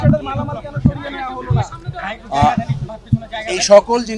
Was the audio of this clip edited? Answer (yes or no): no